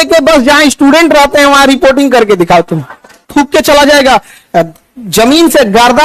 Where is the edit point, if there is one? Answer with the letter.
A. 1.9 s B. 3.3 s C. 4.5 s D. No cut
B